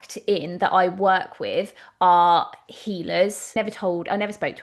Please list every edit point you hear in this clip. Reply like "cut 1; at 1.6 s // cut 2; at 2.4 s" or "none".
cut 1; at 3.6 s